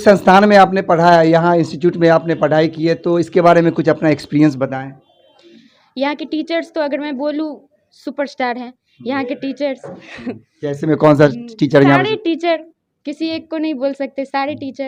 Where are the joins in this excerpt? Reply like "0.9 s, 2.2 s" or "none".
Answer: none